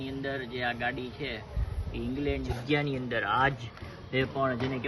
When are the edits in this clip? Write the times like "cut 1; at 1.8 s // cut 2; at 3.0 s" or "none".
cut 1; at 2.5 s